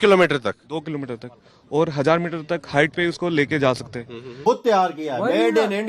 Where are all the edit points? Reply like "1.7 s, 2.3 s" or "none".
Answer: 4.4 s